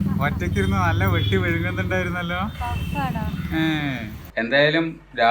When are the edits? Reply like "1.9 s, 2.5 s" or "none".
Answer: 4.2 s

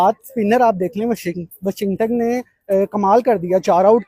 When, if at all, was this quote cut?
none

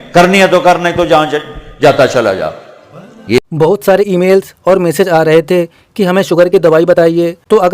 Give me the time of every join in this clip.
3.4 s

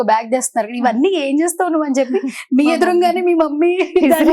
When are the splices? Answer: none

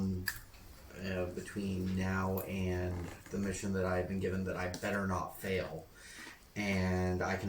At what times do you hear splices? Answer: none

